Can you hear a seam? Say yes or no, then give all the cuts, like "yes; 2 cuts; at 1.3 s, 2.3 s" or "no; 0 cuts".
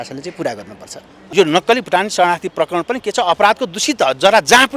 yes; 1 cut; at 1.2 s